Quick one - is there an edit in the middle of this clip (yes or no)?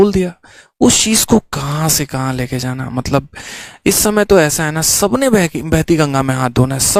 no